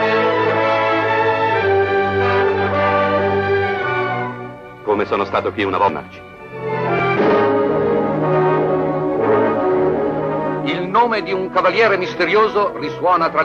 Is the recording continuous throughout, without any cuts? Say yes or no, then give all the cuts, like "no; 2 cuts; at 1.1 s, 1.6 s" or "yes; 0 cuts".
yes; 0 cuts